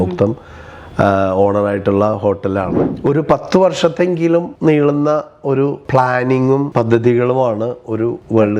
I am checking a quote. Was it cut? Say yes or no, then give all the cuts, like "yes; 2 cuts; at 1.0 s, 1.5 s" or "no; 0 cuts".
yes; 1 cut; at 2.8 s